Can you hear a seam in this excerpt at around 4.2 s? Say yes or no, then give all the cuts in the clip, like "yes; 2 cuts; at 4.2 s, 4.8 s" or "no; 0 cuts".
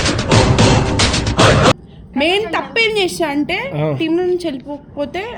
no; 1 cut; at 1.9 s